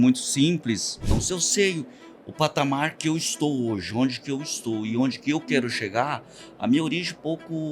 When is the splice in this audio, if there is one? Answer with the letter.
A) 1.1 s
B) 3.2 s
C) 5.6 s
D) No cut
A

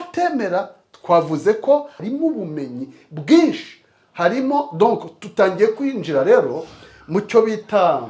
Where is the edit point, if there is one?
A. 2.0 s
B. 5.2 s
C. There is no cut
A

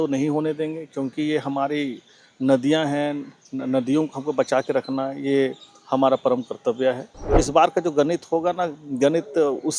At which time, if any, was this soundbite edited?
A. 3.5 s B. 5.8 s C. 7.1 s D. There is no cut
C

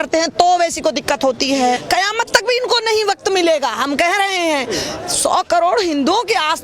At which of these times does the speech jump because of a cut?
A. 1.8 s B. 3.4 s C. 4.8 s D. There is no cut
A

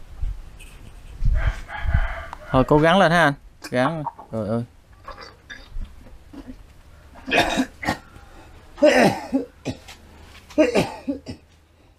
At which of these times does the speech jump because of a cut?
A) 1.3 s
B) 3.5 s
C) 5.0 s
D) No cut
D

